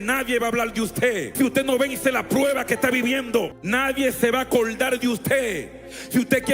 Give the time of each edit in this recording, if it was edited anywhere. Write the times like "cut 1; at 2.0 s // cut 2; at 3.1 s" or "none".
cut 1; at 1.3 s // cut 2; at 3.6 s